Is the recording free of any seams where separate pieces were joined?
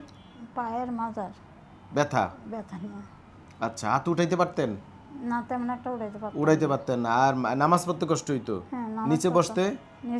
yes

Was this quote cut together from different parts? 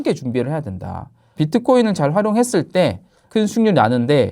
yes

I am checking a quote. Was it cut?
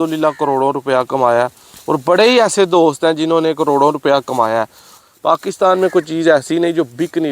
yes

